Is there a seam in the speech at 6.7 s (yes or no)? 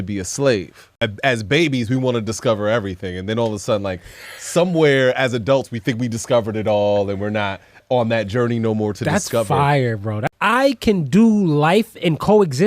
no